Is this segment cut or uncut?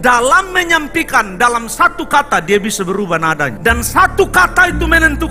uncut